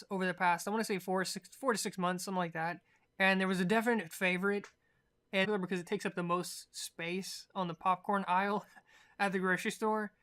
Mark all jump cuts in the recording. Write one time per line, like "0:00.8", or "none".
none